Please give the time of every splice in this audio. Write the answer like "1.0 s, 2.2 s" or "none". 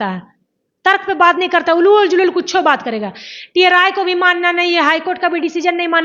none